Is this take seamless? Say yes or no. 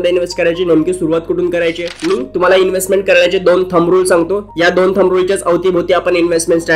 no